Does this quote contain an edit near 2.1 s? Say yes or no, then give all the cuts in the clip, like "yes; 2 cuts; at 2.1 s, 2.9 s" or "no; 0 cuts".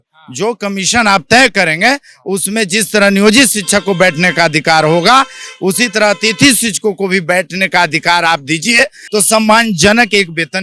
no; 1 cut; at 9.0 s